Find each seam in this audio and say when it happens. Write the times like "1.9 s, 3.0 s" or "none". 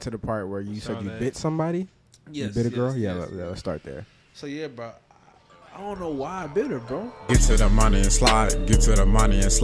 7.2 s